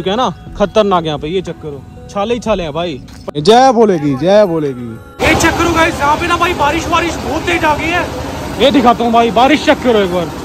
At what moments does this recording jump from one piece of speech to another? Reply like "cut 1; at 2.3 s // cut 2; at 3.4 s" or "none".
cut 1; at 3.4 s // cut 2; at 5.2 s